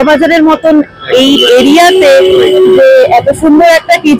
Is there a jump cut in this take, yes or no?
no